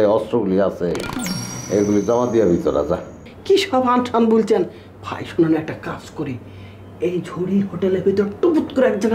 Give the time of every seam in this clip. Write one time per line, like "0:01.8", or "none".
0:03.3